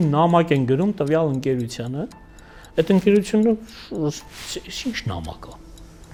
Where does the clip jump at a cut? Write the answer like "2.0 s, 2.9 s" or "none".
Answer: none